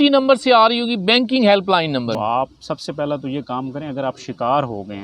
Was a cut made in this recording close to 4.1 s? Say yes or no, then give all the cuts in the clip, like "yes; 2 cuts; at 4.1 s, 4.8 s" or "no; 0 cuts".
no; 1 cut; at 2.2 s